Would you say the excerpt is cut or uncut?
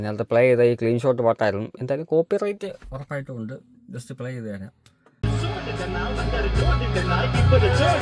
uncut